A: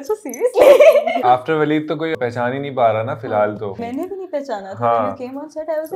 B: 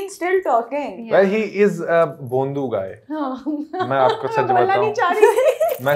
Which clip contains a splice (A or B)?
A